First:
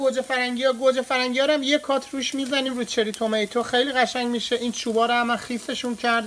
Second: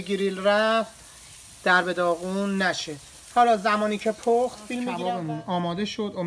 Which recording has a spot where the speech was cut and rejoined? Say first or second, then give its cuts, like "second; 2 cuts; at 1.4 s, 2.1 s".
second; 1 cut; at 5.0 s